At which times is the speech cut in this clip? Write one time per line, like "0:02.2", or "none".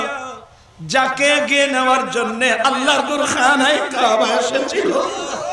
none